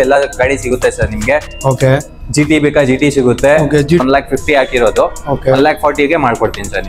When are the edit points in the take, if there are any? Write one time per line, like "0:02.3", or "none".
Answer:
0:04.0

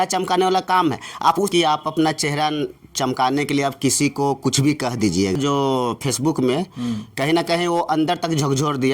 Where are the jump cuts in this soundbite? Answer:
0:01.5
0:05.4

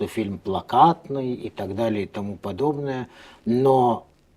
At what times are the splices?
none

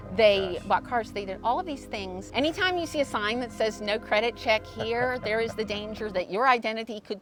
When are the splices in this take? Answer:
none

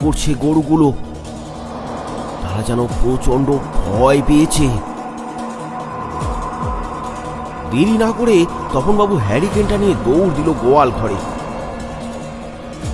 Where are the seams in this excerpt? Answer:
none

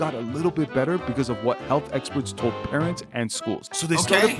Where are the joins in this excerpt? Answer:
none

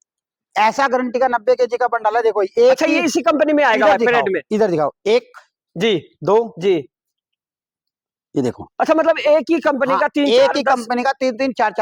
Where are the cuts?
none

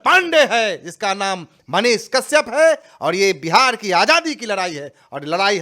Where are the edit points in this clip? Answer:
none

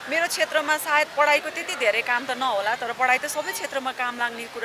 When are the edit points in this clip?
none

